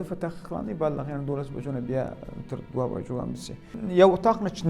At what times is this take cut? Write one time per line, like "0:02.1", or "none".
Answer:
0:03.7